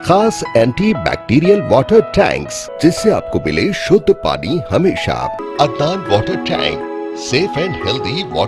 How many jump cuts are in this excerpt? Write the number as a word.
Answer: two